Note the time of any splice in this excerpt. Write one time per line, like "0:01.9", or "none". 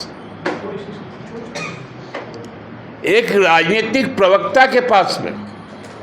none